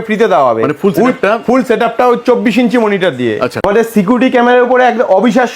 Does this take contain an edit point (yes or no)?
yes